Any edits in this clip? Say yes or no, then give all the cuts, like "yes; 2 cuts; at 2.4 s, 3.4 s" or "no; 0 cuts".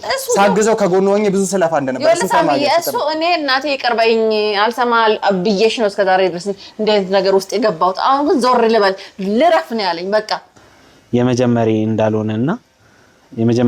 yes; 1 cut; at 10.7 s